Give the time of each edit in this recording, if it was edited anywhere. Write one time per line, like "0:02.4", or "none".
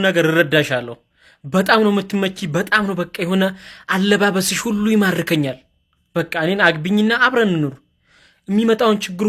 none